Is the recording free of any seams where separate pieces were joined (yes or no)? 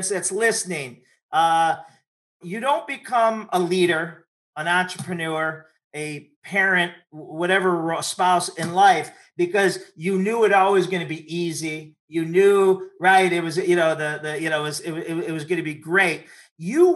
no